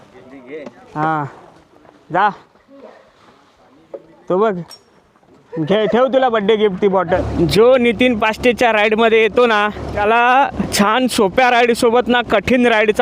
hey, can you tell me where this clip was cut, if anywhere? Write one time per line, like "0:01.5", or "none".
0:07.2
0:09.9
0:10.6

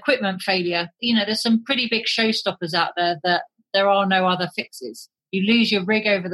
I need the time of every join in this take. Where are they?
0:00.9

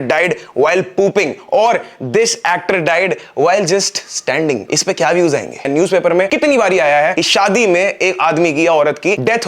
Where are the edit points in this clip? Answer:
0:05.7

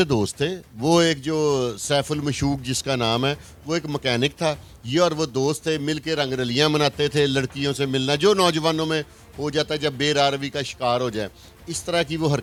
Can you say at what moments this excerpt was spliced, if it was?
none

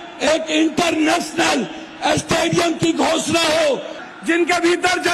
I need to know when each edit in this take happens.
0:04.0

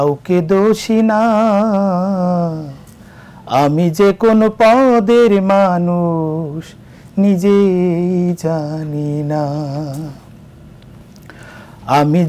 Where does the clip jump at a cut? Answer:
none

